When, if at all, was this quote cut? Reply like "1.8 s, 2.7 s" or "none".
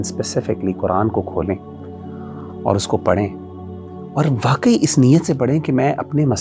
none